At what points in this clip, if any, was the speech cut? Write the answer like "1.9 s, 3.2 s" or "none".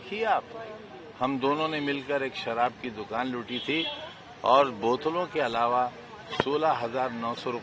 none